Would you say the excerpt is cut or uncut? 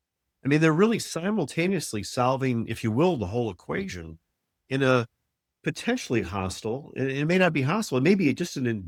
uncut